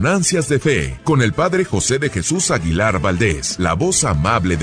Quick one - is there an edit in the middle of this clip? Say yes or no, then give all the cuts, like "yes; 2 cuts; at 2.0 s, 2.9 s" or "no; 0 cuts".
yes; 2 cuts; at 0.9 s, 3.5 s